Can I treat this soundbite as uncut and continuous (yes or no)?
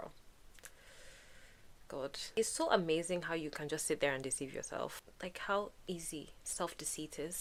yes